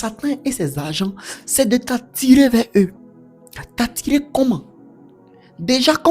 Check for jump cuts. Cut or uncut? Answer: uncut